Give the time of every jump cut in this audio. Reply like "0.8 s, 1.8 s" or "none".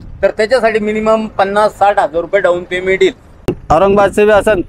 3.5 s